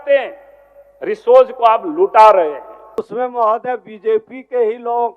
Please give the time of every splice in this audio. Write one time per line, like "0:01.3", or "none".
0:03.0